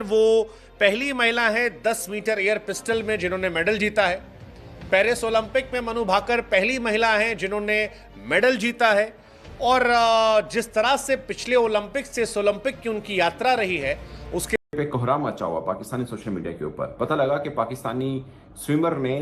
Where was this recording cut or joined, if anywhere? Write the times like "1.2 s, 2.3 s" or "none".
14.6 s